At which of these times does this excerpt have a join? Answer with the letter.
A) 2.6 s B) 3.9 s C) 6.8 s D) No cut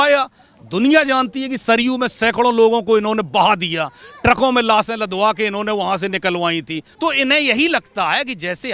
C